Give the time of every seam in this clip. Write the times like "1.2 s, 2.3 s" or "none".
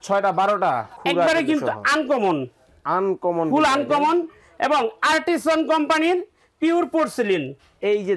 0.9 s